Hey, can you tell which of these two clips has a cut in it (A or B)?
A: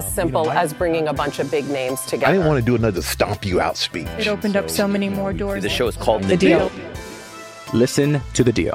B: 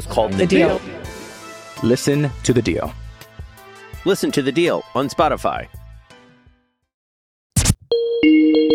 B